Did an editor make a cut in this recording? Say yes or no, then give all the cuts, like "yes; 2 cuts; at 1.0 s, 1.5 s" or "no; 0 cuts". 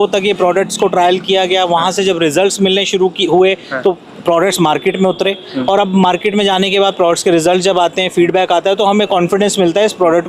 no; 0 cuts